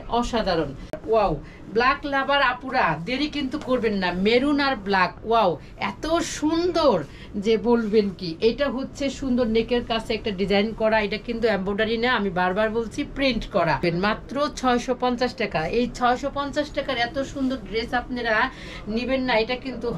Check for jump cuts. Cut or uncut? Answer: cut